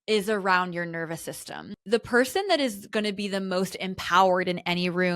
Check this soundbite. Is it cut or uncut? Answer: cut